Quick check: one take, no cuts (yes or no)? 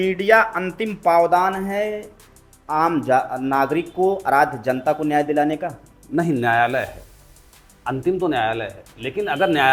yes